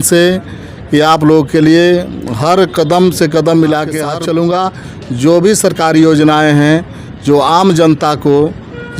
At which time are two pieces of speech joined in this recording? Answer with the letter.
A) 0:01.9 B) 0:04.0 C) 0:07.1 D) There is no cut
B